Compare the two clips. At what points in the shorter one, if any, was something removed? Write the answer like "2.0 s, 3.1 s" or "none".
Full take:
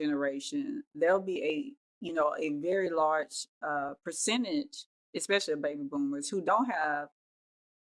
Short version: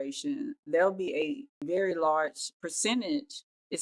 1.6 s, 2.6 s